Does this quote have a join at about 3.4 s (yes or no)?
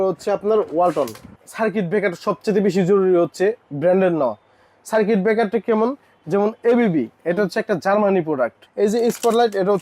no